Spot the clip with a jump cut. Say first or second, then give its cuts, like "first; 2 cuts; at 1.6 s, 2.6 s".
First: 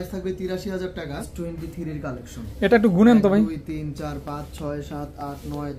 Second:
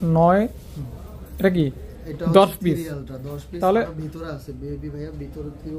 first; 1 cut; at 1.3 s